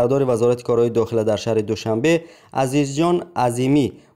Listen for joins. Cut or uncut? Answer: uncut